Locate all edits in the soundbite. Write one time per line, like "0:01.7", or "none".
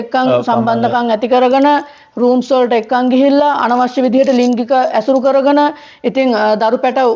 none